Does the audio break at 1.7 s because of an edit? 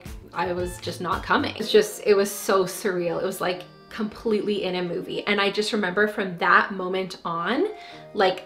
yes; 1 cut; at 1.7 s

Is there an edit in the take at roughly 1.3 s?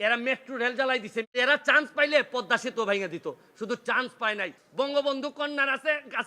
yes; 2 cuts; at 1.3 s, 4.6 s

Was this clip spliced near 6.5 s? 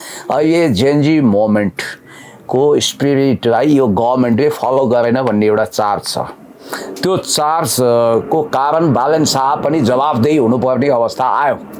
no; 0 cuts

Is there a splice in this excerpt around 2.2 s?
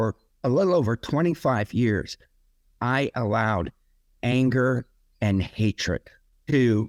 no; 0 cuts

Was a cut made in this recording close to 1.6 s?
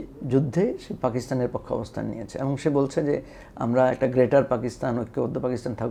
no; 0 cuts

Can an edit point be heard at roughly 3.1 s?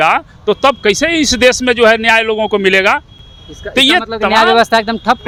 no; 0 cuts

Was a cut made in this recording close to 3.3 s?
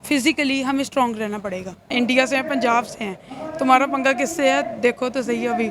no; 1 cut; at 1.8 s

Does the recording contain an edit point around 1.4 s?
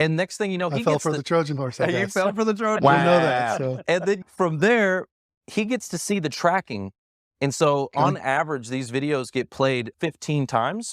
no; 2 cuts; at 4.3 s, 9.9 s

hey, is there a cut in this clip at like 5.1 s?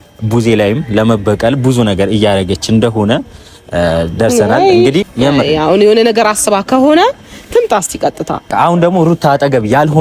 yes; 2 cuts; at 5.1 s, 8.5 s

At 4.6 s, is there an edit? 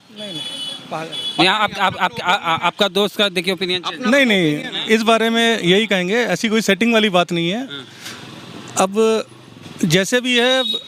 no; 0 cuts

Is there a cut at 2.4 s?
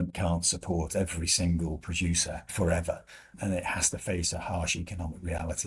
yes; 1 cut; at 2.4 s

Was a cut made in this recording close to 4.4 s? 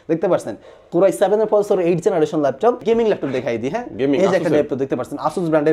no; 1 cut; at 2.8 s

